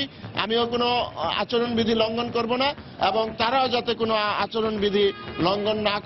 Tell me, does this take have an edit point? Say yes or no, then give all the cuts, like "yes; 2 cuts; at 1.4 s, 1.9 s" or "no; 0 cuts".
no; 0 cuts